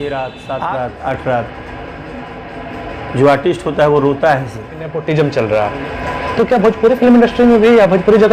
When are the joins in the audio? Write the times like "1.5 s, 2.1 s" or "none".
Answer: 5.0 s